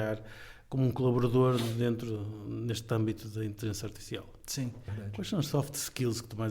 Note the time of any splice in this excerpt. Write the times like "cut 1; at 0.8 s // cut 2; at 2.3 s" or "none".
cut 1; at 5.0 s

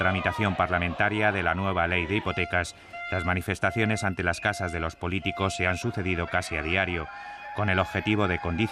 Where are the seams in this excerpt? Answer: cut 1; at 6.8 s

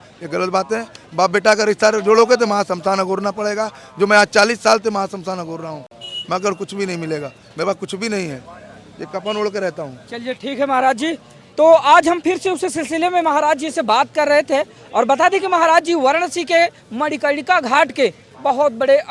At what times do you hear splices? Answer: none

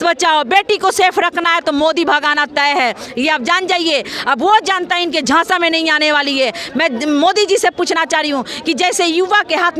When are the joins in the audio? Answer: none

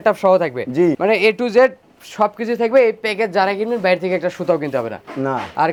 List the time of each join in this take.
none

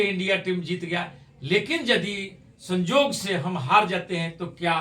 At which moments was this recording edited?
none

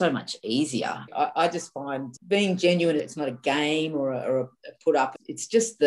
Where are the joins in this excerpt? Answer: cut 1; at 1.1 s // cut 2; at 2.1 s // cut 3; at 3.1 s

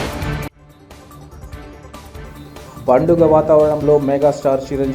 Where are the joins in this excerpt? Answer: none

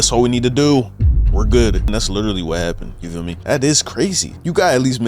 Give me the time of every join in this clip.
cut 1; at 1.9 s // cut 2; at 3.4 s

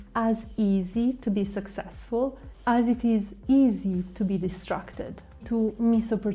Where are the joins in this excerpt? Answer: cut 1; at 5.4 s

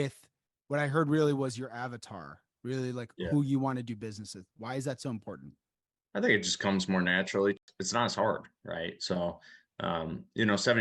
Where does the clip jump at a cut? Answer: cut 1; at 7.6 s

